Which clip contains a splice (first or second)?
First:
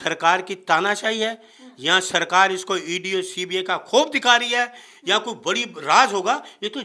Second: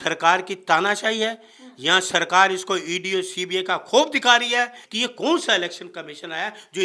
second